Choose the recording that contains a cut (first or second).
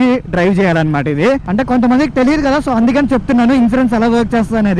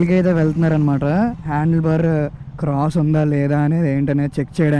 first